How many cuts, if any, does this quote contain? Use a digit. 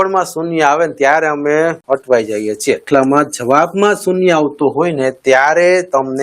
2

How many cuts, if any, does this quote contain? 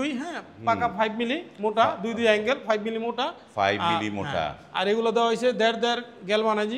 0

